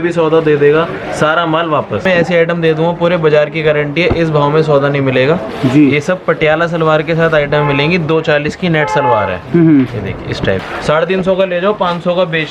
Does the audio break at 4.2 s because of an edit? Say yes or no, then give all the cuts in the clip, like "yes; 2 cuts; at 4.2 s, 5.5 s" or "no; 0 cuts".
no; 2 cuts; at 2.0 s, 10.7 s